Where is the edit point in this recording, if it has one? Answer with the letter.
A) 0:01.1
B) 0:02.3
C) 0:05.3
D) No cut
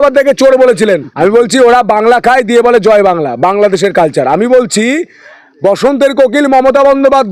A